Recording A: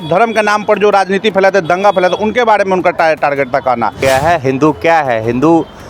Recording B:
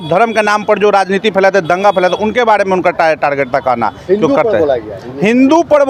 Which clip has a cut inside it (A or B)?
A